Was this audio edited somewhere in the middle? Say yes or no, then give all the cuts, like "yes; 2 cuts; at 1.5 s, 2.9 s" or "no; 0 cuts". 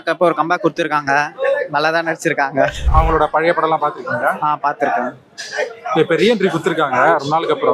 no; 0 cuts